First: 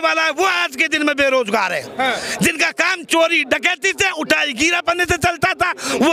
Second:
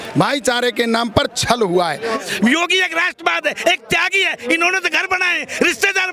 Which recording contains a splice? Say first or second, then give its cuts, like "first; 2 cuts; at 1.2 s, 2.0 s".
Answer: second; 1 cut; at 2.2 s